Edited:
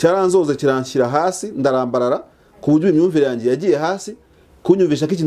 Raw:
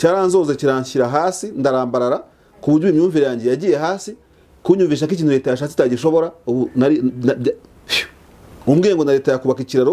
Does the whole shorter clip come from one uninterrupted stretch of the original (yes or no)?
yes